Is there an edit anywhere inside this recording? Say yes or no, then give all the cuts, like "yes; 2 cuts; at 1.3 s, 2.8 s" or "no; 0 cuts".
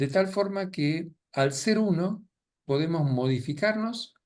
yes; 1 cut; at 1.2 s